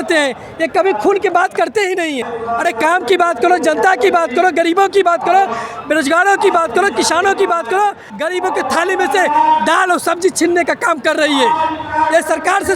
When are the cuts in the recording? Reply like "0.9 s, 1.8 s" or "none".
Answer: 2.4 s, 8.1 s